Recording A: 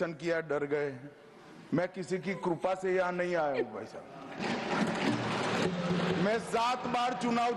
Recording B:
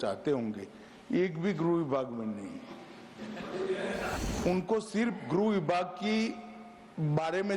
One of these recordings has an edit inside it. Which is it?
B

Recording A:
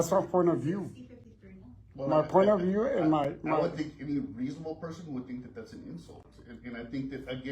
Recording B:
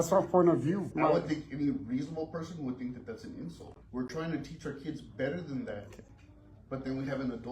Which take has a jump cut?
B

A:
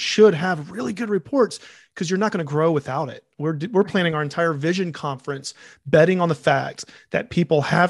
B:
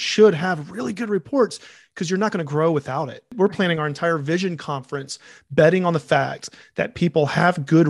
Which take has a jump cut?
B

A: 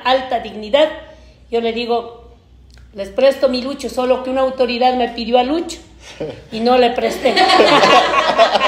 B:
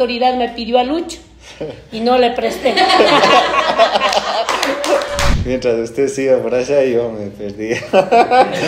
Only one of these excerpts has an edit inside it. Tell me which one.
B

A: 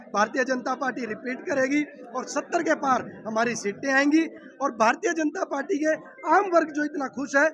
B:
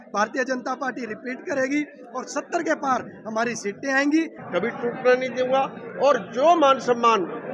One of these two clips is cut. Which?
B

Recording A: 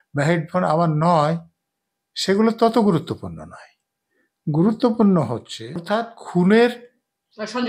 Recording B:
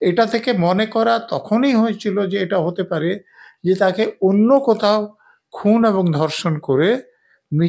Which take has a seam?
A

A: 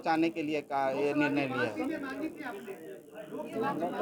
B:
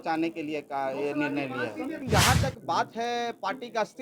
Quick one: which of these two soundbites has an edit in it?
B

